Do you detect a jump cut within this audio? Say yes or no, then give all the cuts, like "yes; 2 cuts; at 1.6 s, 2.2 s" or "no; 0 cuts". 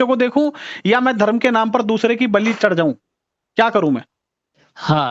no; 0 cuts